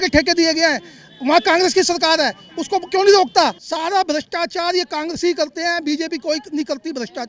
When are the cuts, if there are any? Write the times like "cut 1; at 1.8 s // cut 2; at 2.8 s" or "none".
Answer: cut 1; at 3.6 s